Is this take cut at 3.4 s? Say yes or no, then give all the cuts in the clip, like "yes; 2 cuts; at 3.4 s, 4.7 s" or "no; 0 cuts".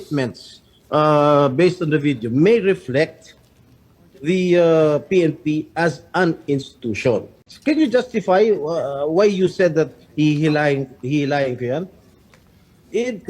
no; 1 cut; at 7.3 s